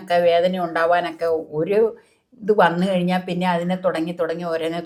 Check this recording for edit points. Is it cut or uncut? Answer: uncut